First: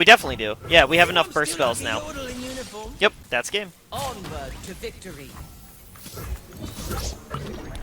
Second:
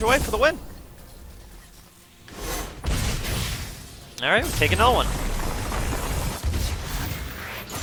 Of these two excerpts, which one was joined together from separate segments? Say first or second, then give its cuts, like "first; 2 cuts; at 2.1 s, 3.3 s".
first; 1 cut; at 3.2 s